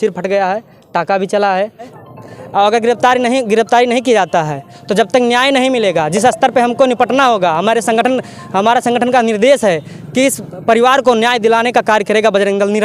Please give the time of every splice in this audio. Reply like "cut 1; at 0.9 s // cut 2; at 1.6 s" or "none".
cut 1; at 1.9 s